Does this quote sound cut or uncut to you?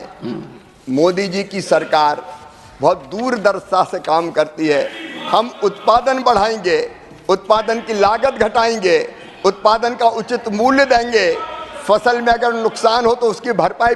uncut